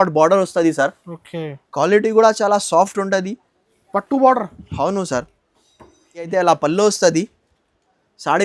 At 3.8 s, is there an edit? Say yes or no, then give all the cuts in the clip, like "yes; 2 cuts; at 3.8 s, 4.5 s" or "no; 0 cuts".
no; 1 cut; at 6.3 s